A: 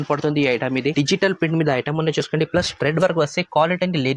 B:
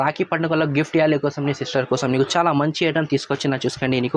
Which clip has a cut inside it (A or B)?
A